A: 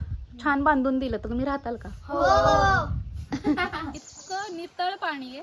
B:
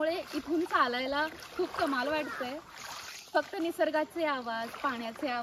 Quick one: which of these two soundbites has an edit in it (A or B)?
A